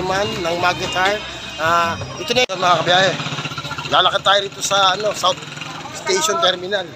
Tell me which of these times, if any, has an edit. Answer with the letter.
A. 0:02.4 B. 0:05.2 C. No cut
A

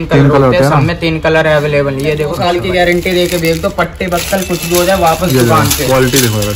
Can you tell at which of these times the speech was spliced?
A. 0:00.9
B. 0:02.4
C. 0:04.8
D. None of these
B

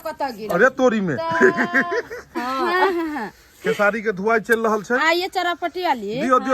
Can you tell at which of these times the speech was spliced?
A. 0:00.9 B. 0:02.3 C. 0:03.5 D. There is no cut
B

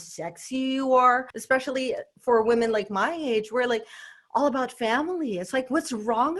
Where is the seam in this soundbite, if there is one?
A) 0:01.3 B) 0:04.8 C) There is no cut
A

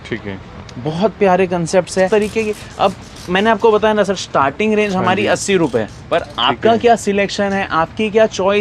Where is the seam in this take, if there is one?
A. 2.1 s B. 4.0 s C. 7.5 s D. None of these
A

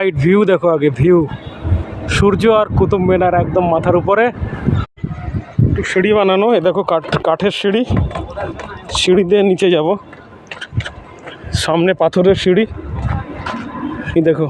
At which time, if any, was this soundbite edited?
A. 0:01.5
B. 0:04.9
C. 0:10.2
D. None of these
B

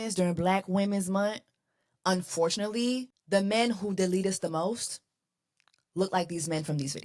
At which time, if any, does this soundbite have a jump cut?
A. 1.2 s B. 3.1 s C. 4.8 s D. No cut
B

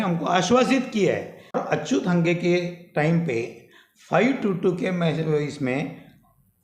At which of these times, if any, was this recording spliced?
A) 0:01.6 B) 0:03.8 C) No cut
A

